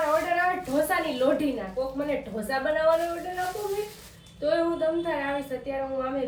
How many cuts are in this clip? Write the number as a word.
zero